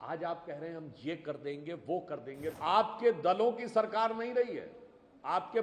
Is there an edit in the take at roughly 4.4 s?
no; 1 cut; at 2.5 s

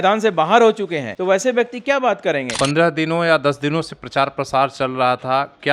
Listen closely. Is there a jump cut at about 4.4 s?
no; 2 cuts; at 1.1 s, 2.5 s

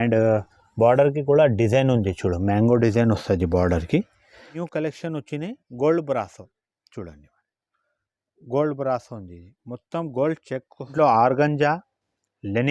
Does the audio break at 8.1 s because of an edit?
no; 2 cuts; at 4.5 s, 10.9 s

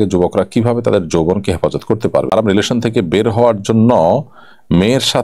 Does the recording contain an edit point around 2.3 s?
yes; 1 cut; at 2.3 s

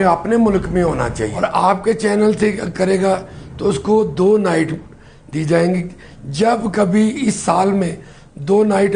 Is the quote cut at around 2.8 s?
no; 1 cut; at 1.3 s

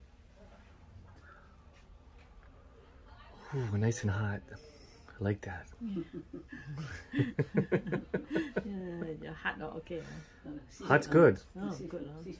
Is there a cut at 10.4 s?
no; 0 cuts

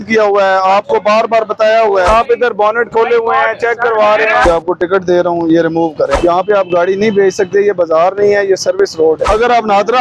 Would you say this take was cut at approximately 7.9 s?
no; 4 cuts; at 2.1 s, 4.4 s, 6.2 s, 9.2 s

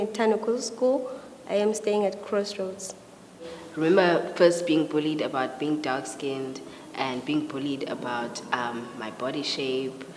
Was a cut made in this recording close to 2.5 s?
yes; 1 cut; at 2.5 s

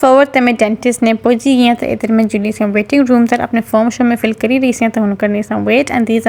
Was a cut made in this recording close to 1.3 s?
no; 0 cuts

